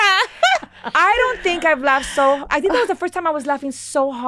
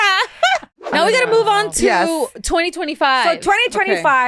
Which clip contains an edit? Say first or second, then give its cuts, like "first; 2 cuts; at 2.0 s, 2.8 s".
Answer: second; 1 cut; at 0.9 s